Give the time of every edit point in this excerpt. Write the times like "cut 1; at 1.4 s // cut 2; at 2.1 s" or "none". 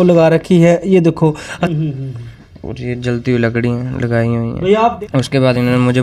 cut 1; at 1.5 s // cut 2; at 5.0 s